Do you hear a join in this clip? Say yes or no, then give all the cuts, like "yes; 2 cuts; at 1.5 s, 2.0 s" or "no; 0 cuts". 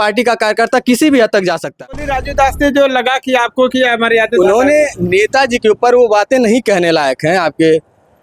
yes; 1 cut; at 2.1 s